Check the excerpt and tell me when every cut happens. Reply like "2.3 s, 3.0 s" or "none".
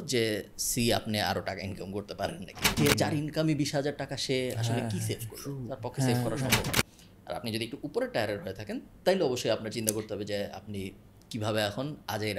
2.8 s, 6.7 s